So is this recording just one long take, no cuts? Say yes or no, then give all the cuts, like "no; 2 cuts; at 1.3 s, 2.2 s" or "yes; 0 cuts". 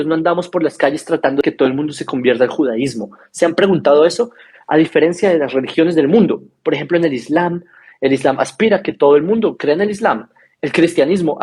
no; 1 cut; at 1.4 s